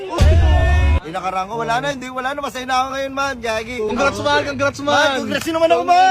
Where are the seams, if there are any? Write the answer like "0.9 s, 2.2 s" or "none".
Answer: 1.0 s, 3.9 s